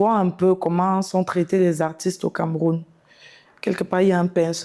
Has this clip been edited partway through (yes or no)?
no